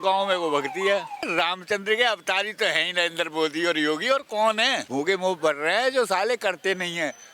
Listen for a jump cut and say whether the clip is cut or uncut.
cut